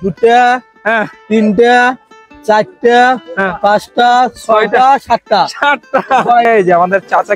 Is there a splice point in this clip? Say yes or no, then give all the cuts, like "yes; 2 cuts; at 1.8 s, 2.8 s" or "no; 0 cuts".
yes; 1 cut; at 6.5 s